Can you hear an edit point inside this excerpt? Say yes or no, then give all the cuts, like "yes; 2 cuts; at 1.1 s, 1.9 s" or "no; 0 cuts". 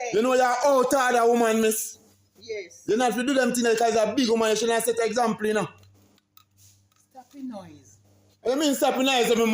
no; 0 cuts